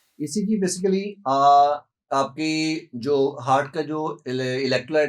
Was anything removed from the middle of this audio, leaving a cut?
no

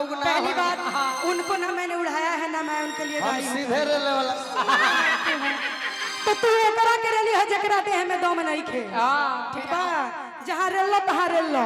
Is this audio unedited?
yes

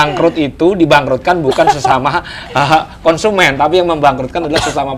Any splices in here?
no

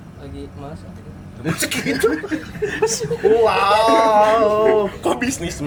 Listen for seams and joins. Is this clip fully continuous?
yes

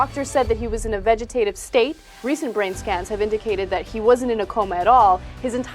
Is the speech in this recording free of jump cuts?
no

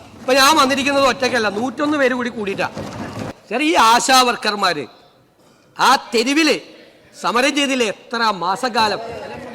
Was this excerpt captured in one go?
no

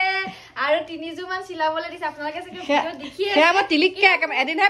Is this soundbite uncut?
yes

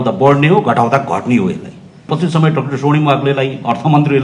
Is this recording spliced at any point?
yes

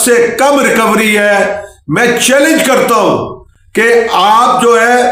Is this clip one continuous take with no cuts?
yes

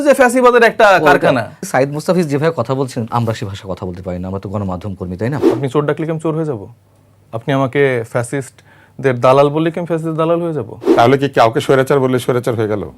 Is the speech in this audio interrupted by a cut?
yes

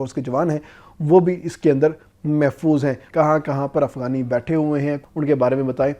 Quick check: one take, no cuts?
no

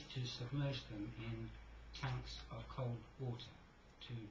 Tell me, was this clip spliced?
yes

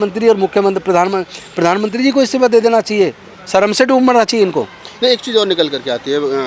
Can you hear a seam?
no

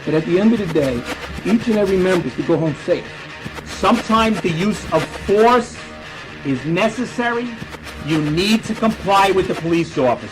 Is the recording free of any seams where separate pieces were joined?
no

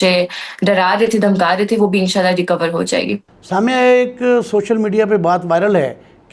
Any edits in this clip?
yes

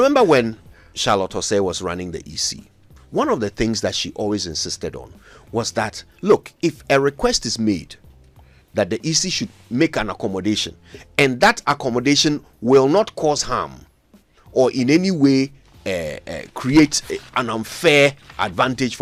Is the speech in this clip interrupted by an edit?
no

